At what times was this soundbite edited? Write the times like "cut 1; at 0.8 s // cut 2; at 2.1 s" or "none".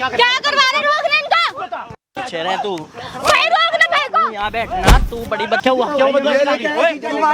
cut 1; at 5.6 s